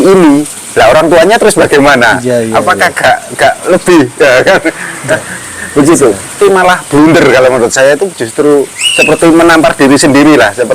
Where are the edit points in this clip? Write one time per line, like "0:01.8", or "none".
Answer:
0:06.3